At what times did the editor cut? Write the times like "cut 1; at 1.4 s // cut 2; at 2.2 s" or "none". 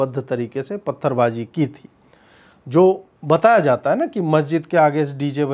none